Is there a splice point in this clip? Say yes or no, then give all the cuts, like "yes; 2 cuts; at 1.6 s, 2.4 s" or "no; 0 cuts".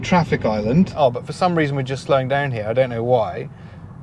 yes; 1 cut; at 0.9 s